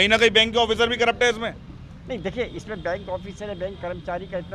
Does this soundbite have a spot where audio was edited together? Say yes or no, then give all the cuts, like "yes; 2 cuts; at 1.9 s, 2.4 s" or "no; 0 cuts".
no; 0 cuts